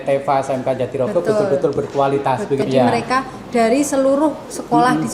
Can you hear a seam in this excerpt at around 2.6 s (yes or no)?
yes